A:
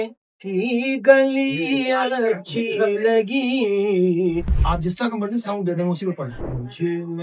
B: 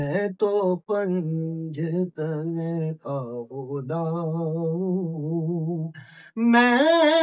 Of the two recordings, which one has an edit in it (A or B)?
A